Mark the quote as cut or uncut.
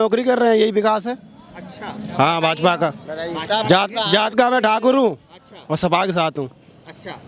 uncut